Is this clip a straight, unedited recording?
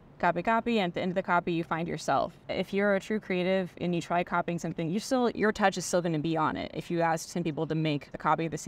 no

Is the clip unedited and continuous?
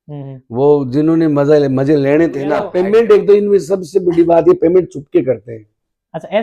no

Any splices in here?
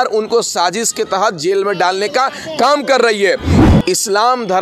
yes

